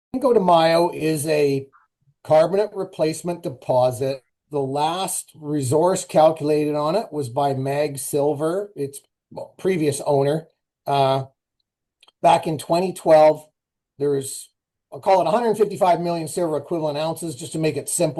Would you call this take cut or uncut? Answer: uncut